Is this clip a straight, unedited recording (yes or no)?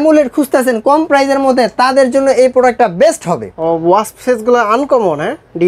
no